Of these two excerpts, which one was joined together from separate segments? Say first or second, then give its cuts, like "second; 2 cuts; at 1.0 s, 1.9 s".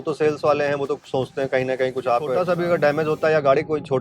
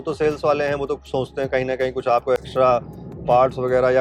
first; 1 cut; at 2.3 s